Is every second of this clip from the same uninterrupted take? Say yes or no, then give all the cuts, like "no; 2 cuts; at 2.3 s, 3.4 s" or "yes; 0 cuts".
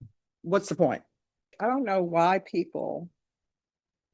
no; 1 cut; at 1.5 s